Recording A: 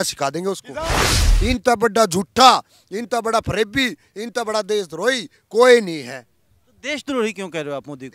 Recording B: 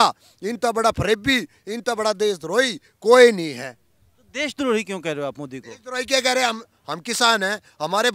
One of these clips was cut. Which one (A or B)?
A